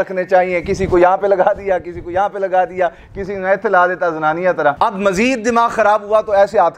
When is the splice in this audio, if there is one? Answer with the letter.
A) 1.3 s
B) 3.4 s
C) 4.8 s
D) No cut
C